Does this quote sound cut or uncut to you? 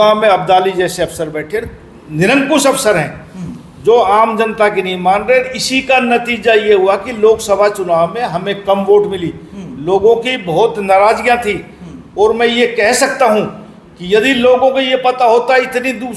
uncut